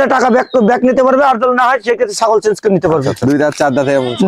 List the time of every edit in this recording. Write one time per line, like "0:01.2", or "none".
0:03.1